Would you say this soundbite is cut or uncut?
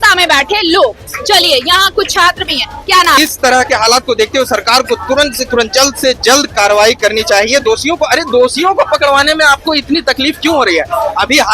cut